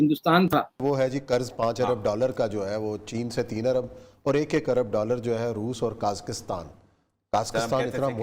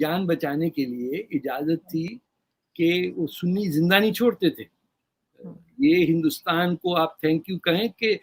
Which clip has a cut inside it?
first; 1 cut; at 1.0 s

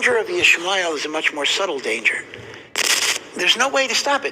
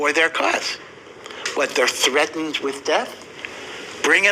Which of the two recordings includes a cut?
first; 1 cut; at 2.9 s

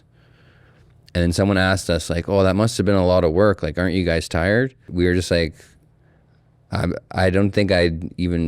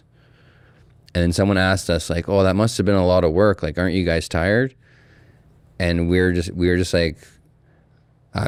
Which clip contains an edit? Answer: first; 1 cut; at 4.9 s

